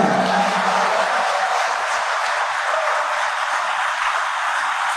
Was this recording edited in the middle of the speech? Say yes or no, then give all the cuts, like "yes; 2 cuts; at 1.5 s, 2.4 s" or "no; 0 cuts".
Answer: no; 0 cuts